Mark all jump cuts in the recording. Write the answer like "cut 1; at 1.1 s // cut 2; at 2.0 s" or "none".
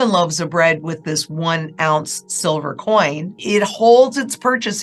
cut 1; at 3.3 s